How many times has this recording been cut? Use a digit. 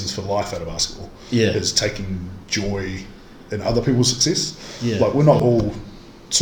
0